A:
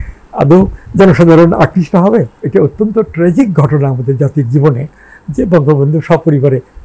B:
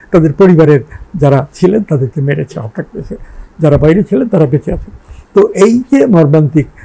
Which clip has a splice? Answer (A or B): A